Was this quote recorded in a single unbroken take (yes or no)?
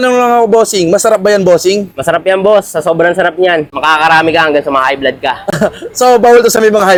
yes